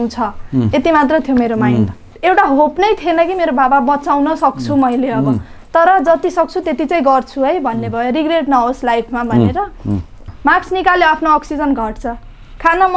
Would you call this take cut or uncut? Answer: cut